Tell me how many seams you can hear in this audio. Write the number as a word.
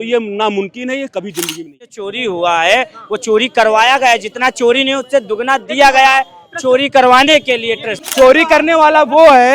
two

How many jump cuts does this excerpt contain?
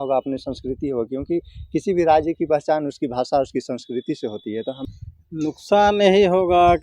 one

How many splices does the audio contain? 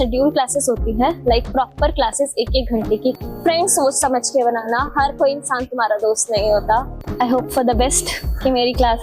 two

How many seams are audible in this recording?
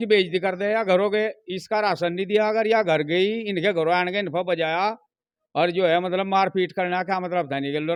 zero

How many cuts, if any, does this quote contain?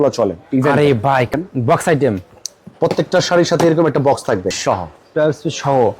two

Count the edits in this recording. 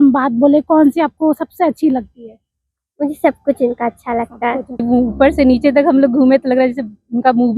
one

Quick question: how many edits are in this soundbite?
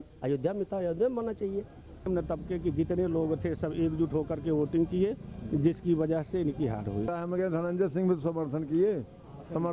two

